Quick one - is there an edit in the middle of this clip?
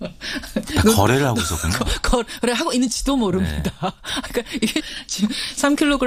no; 0 cuts

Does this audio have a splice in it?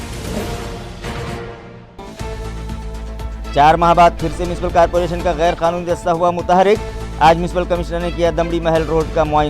yes; 1 cut; at 1.7 s

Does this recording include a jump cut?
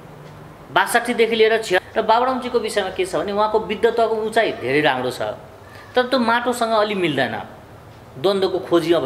yes; 1 cut; at 1.8 s

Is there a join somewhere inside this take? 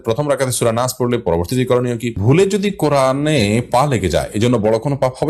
yes; 1 cut; at 2.2 s

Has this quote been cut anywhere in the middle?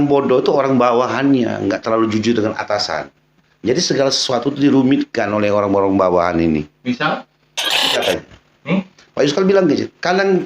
yes; 1 cut; at 7.8 s

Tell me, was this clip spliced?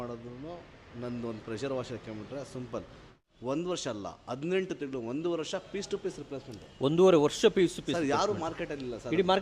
yes; 1 cut; at 3.2 s

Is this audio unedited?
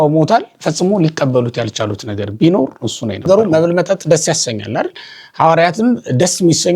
no; 1 cut; at 3.2 s

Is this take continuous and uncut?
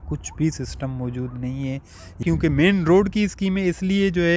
no; 1 cut; at 2.2 s

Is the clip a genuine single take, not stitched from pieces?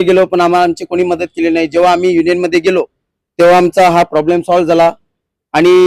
yes; 0 cuts

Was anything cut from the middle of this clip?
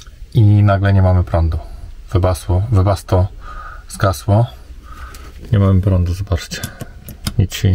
no; 0 cuts

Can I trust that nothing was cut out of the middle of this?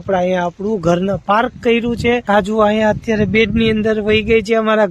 no; 1 cut; at 2.2 s

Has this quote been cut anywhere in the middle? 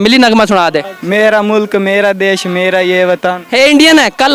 yes; 1 cut; at 0.9 s

